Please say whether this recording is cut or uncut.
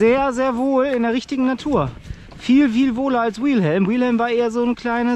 uncut